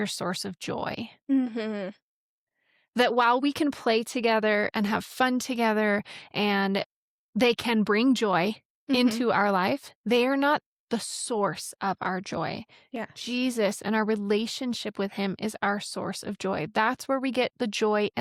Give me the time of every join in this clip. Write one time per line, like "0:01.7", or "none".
none